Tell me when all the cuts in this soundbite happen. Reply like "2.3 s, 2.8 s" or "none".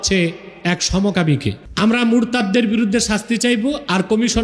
1.6 s